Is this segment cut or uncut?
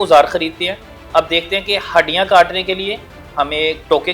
uncut